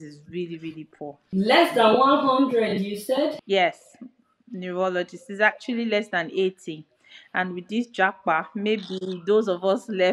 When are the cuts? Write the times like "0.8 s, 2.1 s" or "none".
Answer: 1.2 s, 3.4 s